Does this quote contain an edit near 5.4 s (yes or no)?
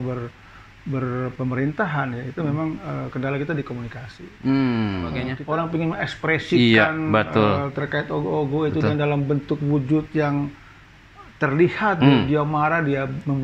yes